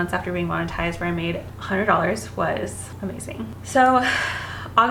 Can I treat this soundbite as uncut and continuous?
yes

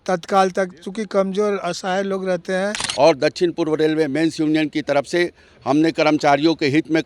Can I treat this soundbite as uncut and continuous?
no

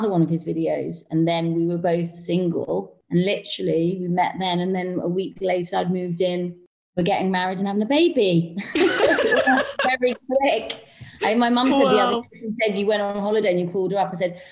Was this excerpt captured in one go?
no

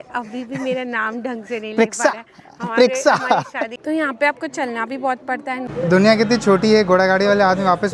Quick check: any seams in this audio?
yes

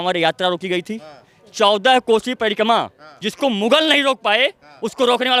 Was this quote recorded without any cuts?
yes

